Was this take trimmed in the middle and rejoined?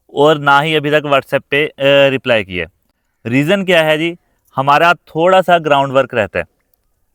no; 0 cuts

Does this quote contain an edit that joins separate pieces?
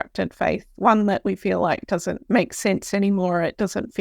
yes; 1 cut; at 2.2 s

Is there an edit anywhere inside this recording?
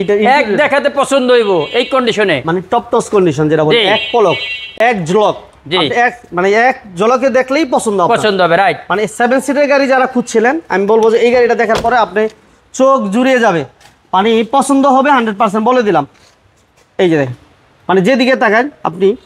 no; 0 cuts

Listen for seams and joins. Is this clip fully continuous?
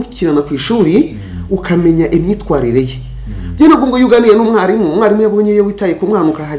yes; 0 cuts

